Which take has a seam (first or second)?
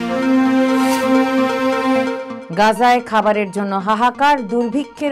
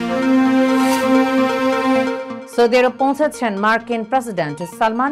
second